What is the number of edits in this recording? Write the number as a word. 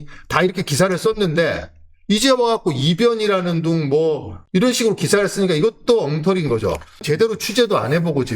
two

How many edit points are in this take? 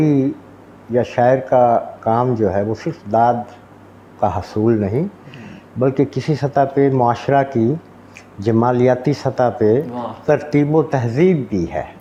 zero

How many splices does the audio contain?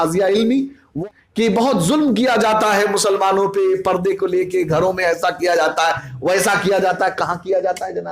one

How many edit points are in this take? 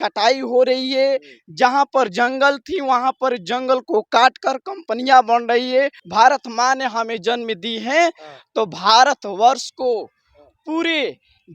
one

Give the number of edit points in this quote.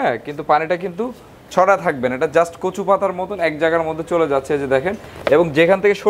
zero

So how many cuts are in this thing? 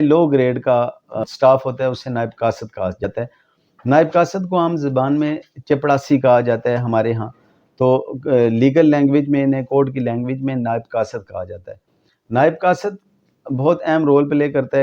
two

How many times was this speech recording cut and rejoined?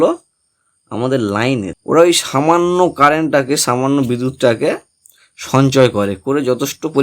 one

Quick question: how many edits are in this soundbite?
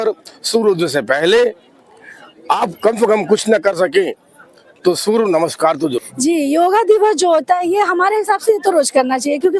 one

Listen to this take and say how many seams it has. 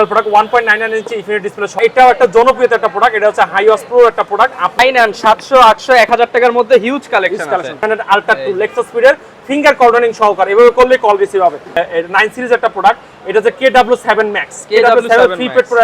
four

